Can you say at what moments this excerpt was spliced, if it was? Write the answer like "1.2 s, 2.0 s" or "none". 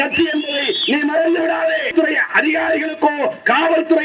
1.9 s

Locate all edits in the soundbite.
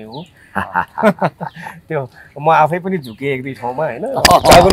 none

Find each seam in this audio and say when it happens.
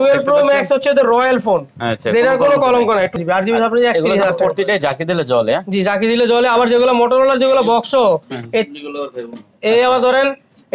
3.2 s

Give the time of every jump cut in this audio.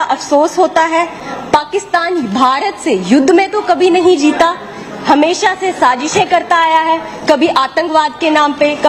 none

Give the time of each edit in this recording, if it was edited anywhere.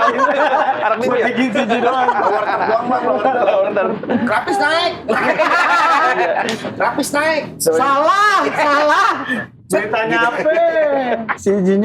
none

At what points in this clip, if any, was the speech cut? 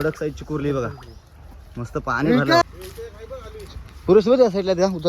2.6 s

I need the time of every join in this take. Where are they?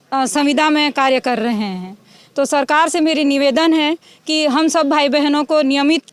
none

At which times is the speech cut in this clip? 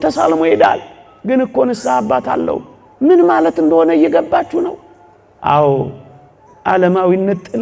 none

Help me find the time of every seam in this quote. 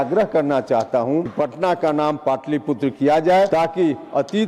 1.3 s, 3.5 s

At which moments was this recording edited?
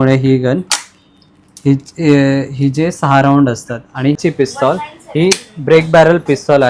4.2 s

